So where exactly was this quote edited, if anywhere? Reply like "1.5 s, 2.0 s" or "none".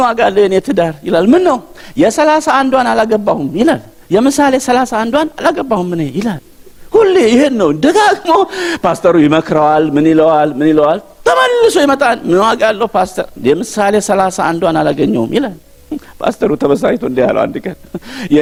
none